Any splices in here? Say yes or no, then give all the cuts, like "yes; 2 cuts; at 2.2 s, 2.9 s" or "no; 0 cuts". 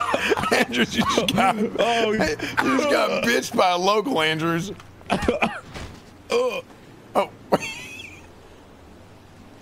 no; 0 cuts